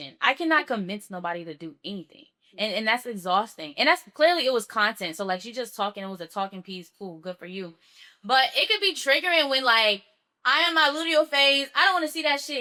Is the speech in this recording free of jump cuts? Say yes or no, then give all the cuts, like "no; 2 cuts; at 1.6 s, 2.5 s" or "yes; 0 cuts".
yes; 0 cuts